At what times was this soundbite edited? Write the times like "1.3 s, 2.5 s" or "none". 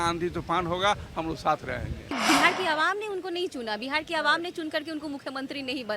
2.2 s